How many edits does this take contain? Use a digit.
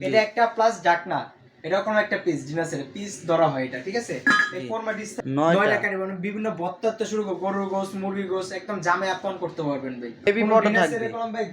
2